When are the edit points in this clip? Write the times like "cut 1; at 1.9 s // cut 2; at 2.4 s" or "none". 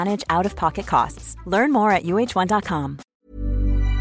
cut 1; at 3.0 s